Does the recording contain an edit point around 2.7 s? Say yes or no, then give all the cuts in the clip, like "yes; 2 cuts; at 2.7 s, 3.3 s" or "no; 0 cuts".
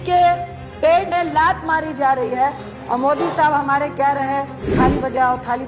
yes; 3 cuts; at 1.1 s, 2.7 s, 4.6 s